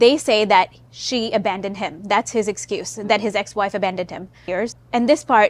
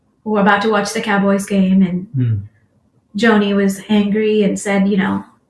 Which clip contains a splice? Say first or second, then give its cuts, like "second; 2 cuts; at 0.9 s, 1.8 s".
first; 1 cut; at 4.5 s